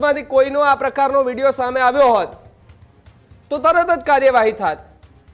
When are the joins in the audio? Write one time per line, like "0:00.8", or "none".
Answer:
none